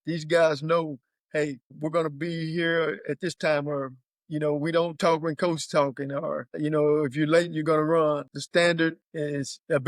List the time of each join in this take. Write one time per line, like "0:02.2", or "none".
0:08.3
0:09.0